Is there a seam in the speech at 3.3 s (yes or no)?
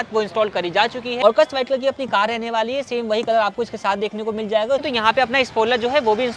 no